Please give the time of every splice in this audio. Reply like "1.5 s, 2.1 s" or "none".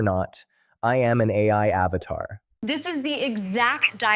2.6 s